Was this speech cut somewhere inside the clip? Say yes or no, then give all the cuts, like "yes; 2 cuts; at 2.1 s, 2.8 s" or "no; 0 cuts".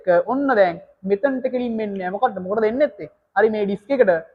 no; 0 cuts